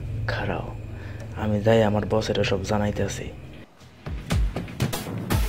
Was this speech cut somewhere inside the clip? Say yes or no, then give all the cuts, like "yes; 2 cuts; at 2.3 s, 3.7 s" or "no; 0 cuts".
yes; 1 cut; at 3.8 s